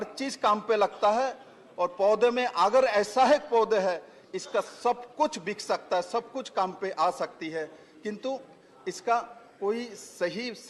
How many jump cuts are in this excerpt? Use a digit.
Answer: 0